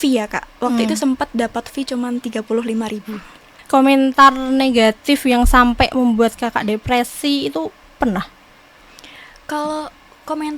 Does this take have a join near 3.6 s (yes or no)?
yes